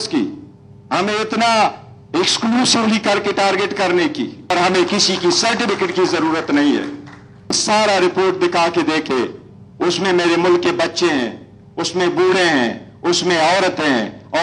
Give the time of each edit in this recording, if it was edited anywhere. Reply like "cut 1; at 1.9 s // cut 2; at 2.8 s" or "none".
cut 1; at 4.5 s // cut 2; at 7.6 s